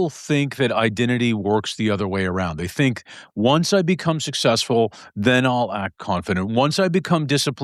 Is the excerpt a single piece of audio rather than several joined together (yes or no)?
yes